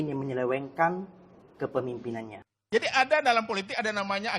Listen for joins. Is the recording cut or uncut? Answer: cut